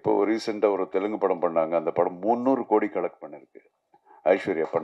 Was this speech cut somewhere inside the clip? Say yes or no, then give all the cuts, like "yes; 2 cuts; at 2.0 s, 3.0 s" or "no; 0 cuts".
no; 0 cuts